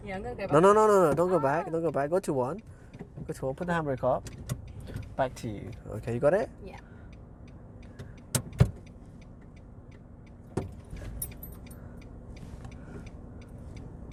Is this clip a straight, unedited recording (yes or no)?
yes